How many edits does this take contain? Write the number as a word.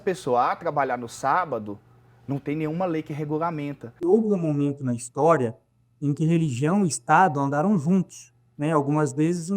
one